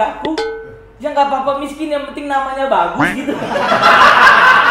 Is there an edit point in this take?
no; 0 cuts

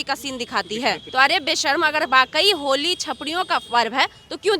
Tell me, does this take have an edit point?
yes; 1 cut; at 1.0 s

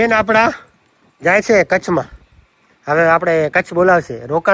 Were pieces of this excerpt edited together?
no; 0 cuts

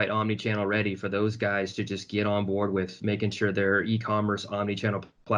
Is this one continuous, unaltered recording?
yes; 0 cuts

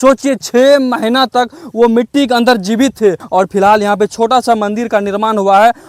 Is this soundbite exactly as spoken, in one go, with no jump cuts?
yes; 0 cuts

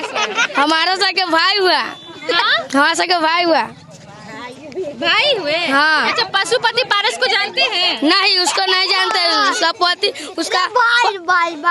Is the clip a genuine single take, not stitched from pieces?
yes; 0 cuts

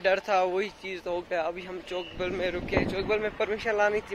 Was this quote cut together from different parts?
no; 0 cuts

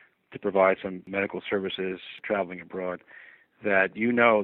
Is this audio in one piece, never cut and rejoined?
no; 2 cuts; at 1.0 s, 2.1 s

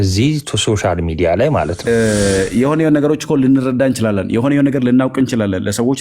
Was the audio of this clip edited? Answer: yes; 1 cut; at 1.8 s

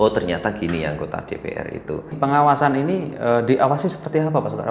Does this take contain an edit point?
yes; 1 cut; at 2.1 s

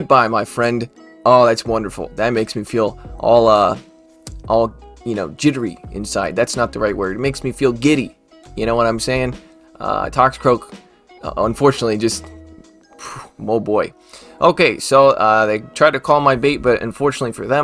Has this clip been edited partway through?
no; 0 cuts

